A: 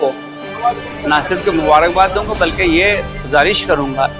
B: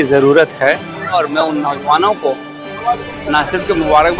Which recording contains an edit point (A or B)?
B